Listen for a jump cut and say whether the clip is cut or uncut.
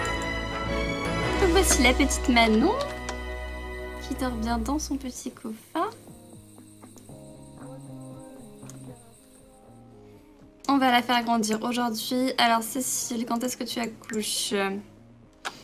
uncut